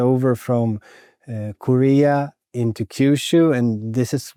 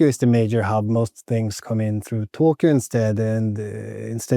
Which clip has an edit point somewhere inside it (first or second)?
second